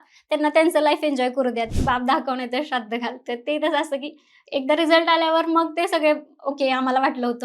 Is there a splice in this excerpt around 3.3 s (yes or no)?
no